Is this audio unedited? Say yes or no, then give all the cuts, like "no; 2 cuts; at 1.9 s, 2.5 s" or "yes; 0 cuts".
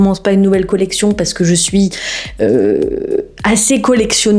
yes; 0 cuts